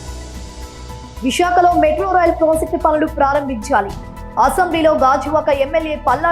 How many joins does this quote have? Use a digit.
1